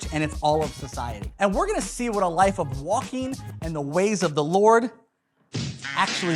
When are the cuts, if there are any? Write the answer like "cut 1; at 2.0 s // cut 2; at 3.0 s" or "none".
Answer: cut 1; at 1.2 s

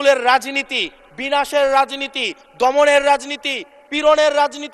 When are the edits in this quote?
none

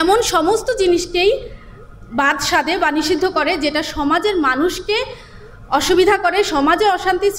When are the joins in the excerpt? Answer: none

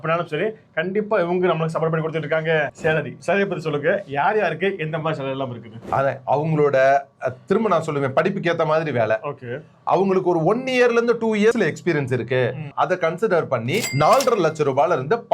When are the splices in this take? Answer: cut 1; at 2.7 s // cut 2; at 11.6 s // cut 3; at 12.7 s

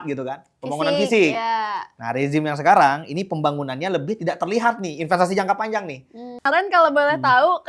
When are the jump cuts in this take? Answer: cut 1; at 6.4 s

